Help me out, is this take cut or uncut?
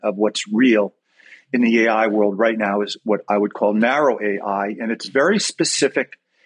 uncut